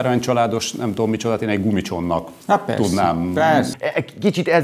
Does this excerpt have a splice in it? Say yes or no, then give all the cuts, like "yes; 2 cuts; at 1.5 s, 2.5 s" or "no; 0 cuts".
yes; 1 cut; at 3.7 s